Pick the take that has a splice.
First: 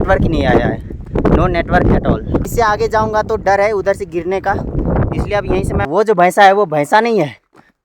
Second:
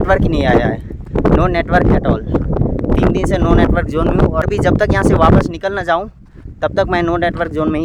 first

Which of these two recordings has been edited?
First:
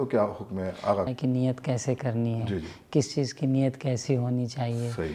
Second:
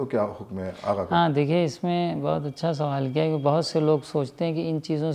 first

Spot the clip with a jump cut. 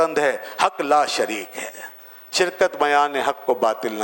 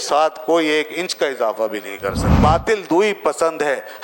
second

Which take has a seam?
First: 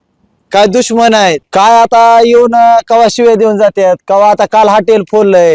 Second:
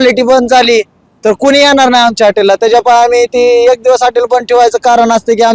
first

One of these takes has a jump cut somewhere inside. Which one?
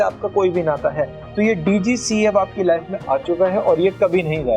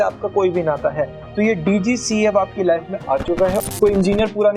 second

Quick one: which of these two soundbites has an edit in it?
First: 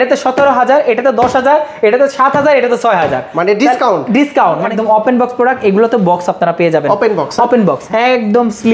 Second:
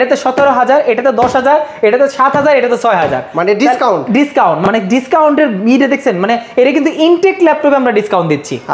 first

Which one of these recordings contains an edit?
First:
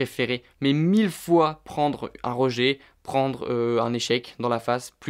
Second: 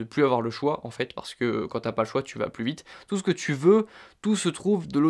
second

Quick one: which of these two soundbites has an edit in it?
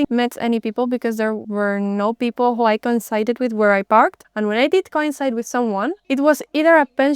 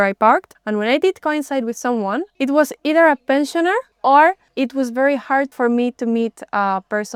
first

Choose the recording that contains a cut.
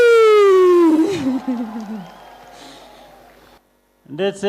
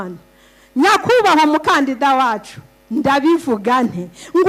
first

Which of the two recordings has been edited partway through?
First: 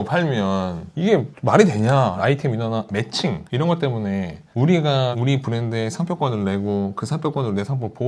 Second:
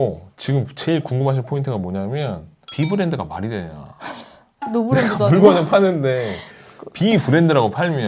first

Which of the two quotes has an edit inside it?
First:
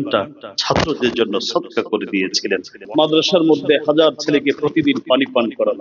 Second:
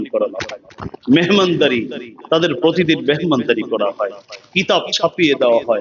first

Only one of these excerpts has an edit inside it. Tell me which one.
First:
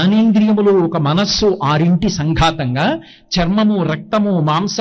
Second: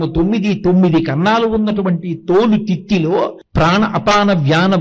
second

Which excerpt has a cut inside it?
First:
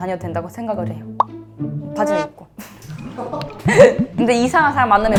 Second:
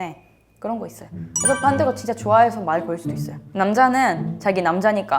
second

